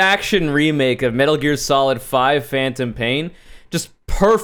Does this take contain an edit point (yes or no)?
no